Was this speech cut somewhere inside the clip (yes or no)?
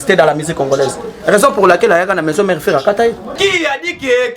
yes